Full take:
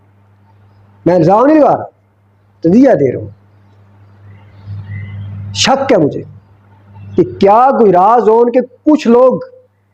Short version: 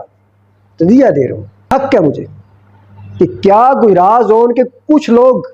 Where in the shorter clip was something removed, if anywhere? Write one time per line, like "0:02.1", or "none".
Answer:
0:01.5